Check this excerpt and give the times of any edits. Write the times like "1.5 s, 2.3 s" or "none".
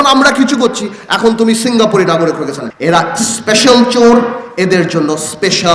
2.6 s